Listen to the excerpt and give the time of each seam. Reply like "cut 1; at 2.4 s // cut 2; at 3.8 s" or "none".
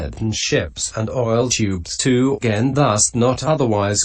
none